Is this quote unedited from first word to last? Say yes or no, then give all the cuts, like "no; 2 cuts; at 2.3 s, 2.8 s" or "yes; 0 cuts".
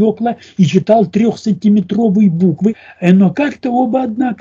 no; 1 cut; at 2.9 s